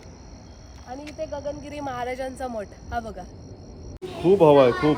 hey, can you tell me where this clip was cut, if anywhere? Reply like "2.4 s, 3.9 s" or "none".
4.0 s